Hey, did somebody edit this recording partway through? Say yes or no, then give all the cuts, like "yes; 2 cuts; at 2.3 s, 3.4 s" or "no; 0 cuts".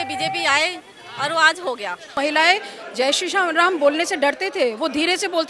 yes; 1 cut; at 2.1 s